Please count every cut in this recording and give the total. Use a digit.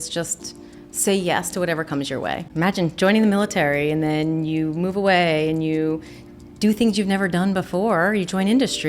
1